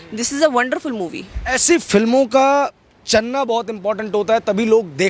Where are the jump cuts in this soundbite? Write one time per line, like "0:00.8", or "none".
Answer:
none